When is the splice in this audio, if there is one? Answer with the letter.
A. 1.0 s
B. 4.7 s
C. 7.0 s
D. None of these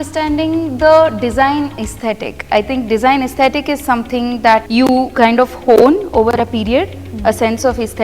B